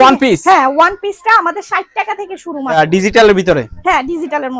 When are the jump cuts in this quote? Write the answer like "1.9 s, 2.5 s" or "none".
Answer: 2.7 s